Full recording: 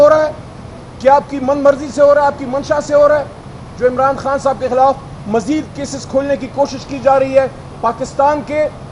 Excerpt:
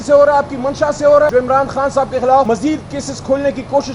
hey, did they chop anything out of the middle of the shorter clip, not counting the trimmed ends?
yes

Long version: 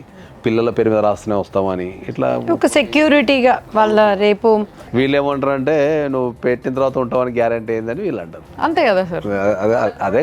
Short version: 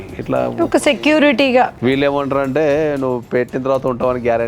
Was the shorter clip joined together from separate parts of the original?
yes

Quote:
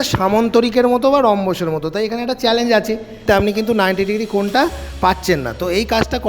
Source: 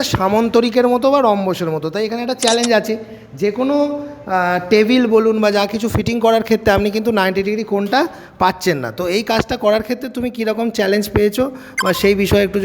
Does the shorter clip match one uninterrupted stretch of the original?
no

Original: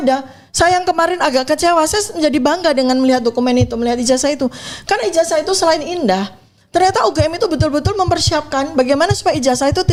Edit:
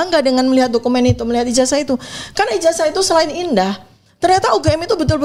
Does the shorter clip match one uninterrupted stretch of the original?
yes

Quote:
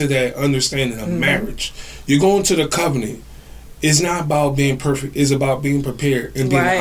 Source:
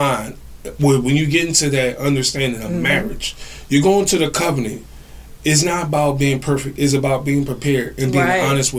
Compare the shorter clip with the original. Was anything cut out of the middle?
no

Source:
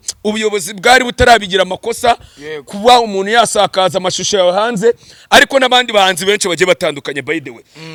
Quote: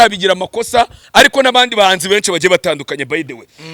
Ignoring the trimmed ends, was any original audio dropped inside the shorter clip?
yes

